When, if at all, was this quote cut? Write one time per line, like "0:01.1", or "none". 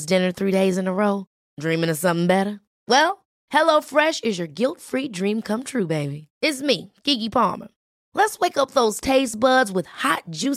none